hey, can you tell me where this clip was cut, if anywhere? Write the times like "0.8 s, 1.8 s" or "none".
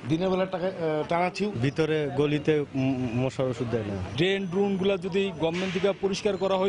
1.6 s, 4.1 s